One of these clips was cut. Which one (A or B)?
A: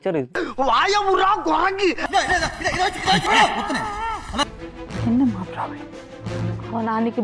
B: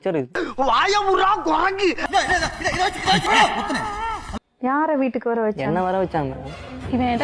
B